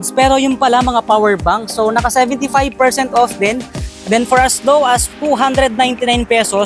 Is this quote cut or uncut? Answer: uncut